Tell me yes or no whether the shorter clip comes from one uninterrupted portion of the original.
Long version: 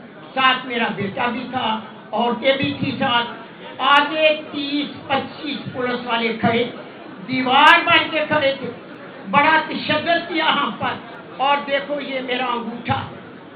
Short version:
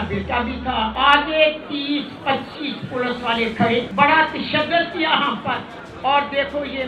no